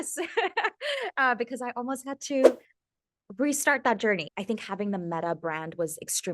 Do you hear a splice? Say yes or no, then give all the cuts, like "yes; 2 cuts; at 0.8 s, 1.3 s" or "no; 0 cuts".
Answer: yes; 1 cut; at 4.3 s